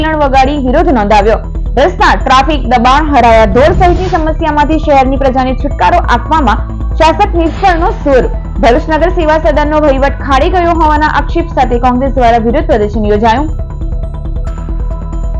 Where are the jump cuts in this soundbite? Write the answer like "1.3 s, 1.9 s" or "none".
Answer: none